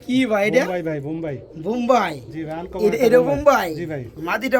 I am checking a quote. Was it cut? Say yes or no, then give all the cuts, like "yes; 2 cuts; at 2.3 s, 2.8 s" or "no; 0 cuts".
no; 0 cuts